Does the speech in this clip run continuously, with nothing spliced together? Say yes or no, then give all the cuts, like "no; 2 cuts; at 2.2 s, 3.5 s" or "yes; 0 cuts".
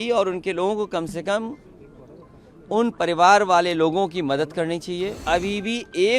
no; 1 cut; at 5.2 s